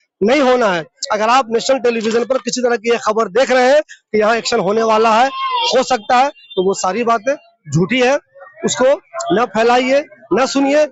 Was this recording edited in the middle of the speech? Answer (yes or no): no